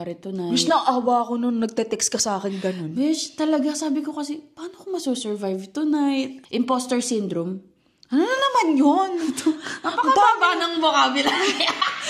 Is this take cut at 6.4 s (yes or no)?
yes